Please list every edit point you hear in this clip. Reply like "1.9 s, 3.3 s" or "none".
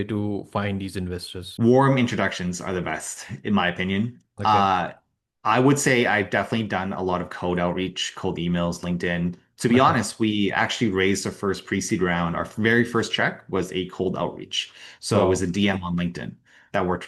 1.4 s